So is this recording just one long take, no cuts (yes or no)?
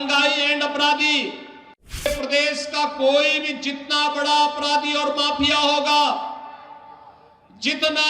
no